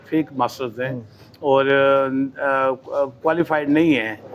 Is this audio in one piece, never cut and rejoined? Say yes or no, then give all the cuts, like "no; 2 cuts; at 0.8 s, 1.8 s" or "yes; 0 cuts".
yes; 0 cuts